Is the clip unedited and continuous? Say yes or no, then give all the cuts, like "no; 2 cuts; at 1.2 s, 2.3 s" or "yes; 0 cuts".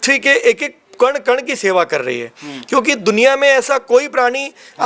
yes; 0 cuts